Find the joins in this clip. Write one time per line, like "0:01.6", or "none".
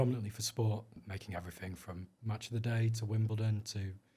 0:01.0

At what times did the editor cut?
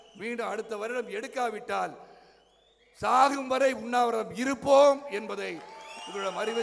none

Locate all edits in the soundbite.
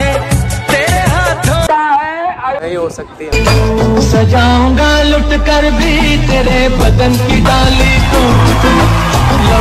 0:01.7

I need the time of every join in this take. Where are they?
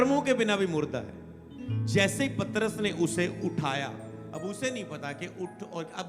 none

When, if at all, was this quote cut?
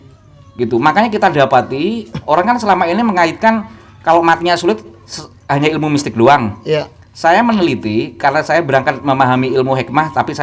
none

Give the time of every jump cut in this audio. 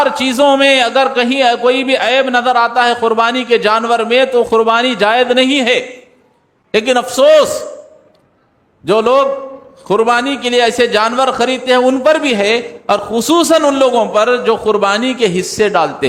none

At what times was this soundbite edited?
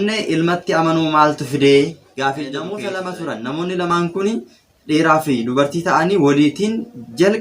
0:02.8

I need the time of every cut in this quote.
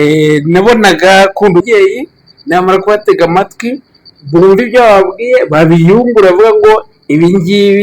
0:01.7

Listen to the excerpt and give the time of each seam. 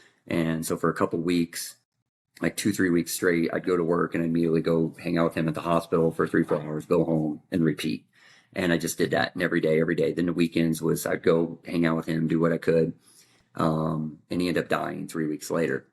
none

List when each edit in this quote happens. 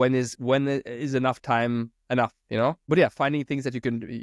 0:02.8

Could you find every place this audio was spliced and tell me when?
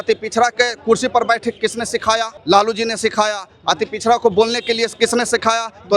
0:02.3

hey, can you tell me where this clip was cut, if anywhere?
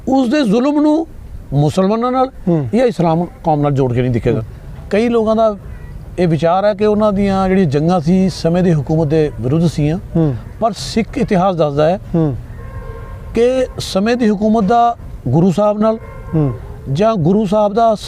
0:04.4

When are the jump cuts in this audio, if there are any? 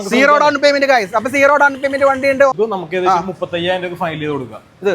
0:02.5

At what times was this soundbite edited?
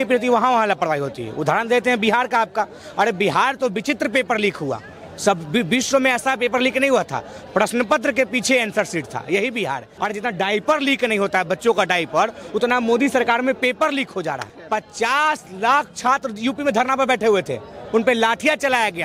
0:09.9
0:14.5

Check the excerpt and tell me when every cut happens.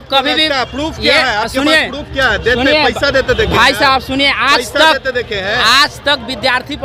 none

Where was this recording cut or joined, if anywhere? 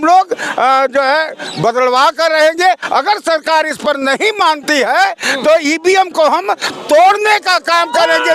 none

